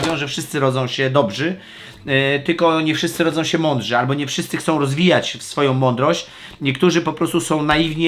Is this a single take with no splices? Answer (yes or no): yes